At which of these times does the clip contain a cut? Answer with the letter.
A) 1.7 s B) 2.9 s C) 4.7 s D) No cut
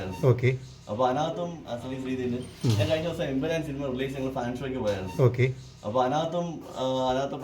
A